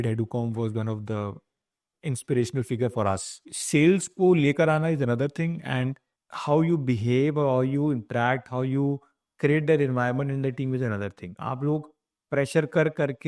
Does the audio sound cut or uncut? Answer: cut